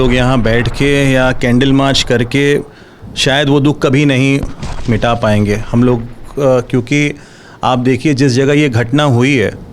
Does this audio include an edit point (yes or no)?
no